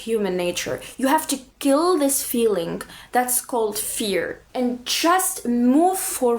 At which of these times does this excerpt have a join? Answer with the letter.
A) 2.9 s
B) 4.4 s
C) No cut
B